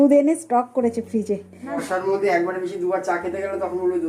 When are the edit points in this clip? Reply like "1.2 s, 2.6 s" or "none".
1.7 s